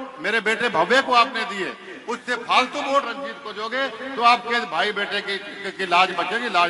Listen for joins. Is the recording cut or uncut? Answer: uncut